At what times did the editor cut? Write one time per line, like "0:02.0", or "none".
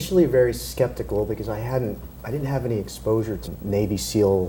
none